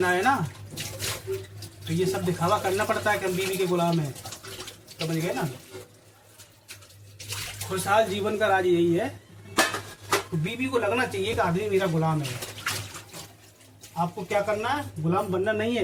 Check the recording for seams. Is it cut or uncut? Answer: uncut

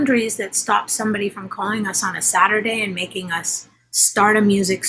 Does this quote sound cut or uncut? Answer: uncut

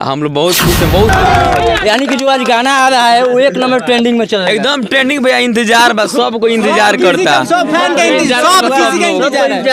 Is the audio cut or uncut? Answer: cut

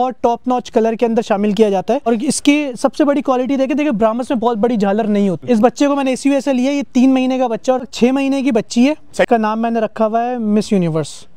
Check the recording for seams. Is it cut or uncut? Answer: cut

